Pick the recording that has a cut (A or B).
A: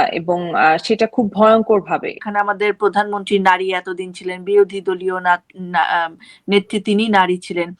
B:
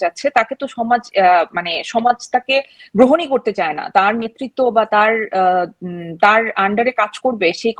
A